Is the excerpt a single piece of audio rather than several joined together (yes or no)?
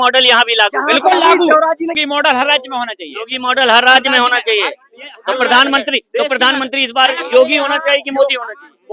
no